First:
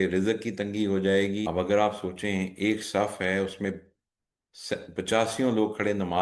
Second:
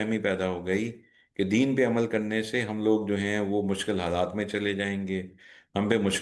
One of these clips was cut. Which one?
first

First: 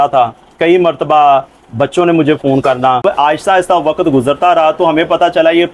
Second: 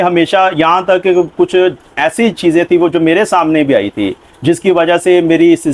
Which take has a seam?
first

